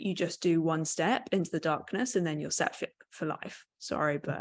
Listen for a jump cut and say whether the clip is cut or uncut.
uncut